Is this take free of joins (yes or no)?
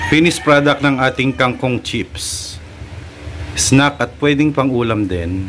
no